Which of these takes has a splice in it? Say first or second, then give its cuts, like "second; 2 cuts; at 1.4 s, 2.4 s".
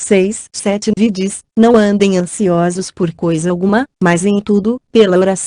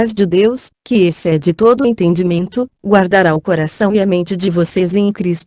first; 1 cut; at 1.0 s